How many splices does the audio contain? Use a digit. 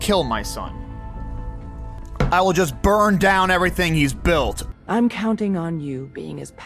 2